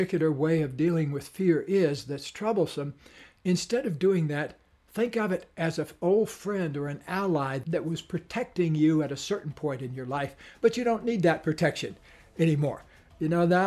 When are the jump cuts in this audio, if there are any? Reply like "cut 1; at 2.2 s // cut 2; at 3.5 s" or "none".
cut 1; at 7.6 s